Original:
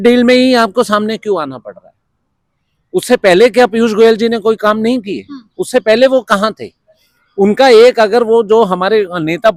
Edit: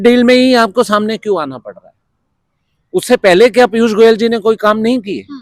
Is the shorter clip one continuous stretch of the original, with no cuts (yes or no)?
yes